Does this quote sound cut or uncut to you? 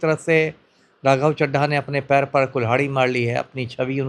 uncut